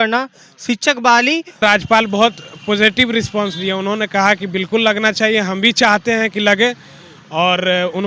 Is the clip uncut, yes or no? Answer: no